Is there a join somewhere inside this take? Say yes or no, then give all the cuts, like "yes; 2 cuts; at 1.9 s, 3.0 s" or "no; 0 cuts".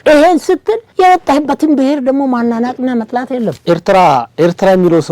yes; 1 cut; at 3.6 s